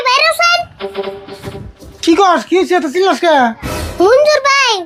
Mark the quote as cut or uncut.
uncut